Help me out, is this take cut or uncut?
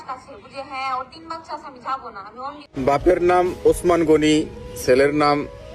cut